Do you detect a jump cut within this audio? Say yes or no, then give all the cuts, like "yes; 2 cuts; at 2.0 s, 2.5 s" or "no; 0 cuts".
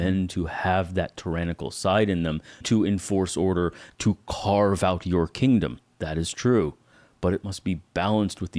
yes; 2 cuts; at 2.7 s, 3.9 s